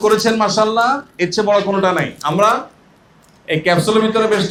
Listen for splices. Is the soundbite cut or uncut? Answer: uncut